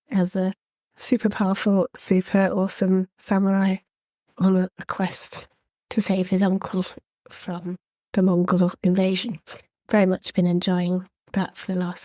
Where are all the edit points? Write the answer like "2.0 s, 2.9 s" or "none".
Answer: none